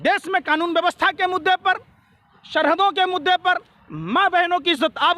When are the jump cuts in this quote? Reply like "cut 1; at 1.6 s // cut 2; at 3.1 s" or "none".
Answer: none